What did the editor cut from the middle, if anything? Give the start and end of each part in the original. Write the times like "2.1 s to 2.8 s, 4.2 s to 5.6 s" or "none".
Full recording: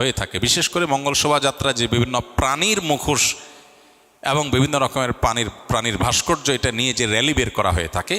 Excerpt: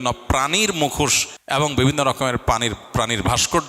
3.4 s to 4.0 s